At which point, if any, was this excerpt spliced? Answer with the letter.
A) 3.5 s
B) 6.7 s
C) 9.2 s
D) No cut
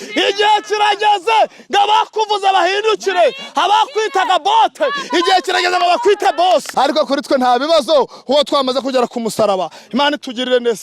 B